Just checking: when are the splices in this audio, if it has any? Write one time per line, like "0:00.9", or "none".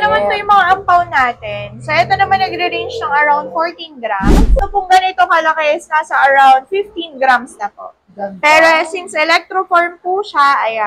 0:04.6